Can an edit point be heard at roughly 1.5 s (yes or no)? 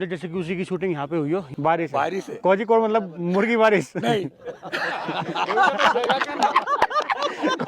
yes